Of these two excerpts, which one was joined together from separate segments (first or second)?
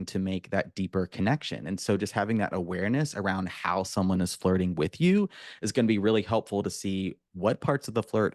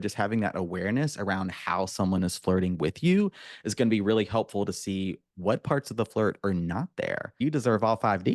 second